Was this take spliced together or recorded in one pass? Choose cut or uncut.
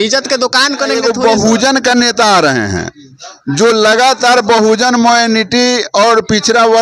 cut